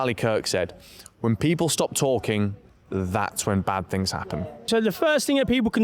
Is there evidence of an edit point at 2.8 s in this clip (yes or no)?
no